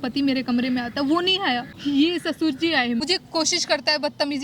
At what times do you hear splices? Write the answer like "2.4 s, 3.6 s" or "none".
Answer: 1.7 s, 3.0 s

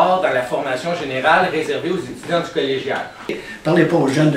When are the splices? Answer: 3.4 s

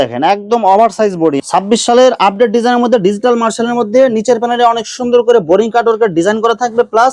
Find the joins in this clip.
1.4 s

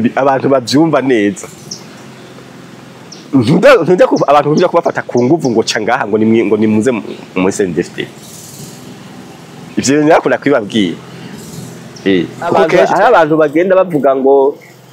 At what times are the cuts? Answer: 12.7 s

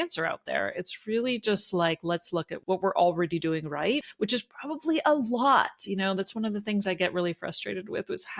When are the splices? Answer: 2.5 s, 4.1 s

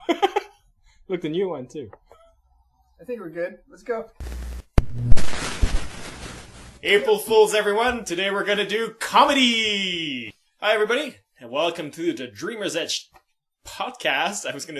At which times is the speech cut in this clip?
none

